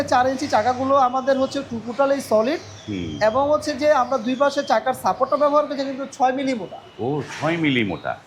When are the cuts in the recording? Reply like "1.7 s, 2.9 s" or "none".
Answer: none